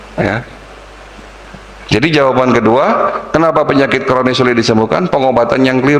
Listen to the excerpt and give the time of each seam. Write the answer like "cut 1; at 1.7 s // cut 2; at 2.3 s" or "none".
none